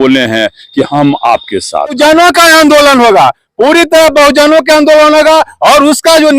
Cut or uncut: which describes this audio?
cut